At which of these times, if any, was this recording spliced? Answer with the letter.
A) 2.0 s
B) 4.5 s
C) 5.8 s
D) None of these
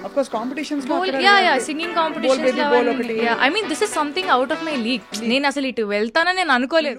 D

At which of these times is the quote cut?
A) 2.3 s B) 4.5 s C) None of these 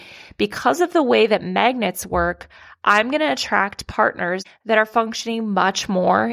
B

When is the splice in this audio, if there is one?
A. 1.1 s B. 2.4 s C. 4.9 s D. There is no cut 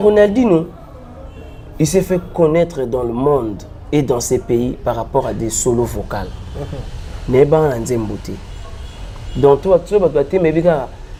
D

